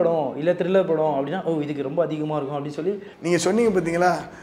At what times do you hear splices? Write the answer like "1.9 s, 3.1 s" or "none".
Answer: 3.1 s